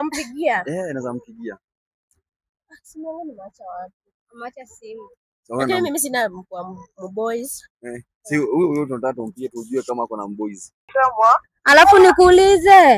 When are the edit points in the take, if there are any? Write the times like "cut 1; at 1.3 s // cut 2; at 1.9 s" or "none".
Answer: cut 1; at 10.9 s